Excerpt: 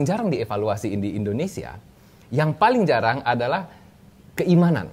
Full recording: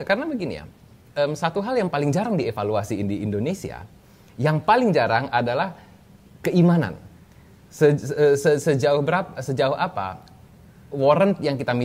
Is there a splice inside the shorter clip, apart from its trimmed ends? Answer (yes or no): no